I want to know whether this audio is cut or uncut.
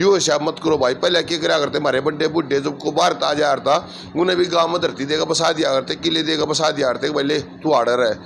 uncut